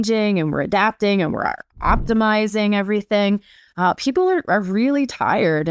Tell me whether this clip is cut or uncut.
uncut